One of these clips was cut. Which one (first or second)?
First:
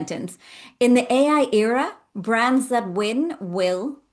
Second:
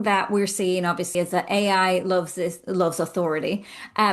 second